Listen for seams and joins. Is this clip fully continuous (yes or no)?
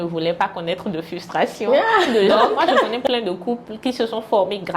no